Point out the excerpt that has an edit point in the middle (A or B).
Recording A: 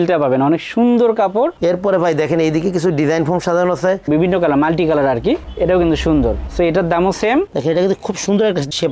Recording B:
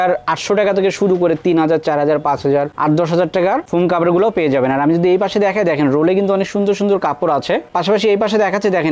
A